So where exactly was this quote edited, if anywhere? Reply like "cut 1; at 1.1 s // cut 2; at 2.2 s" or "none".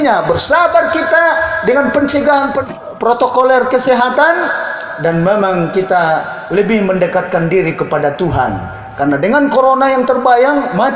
cut 1; at 2.6 s